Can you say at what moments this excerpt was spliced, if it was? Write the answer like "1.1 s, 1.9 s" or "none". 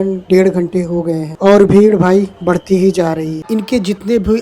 3.4 s